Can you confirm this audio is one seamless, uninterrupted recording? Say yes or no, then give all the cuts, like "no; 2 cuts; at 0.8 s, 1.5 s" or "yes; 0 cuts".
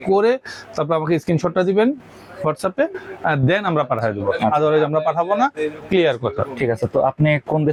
yes; 0 cuts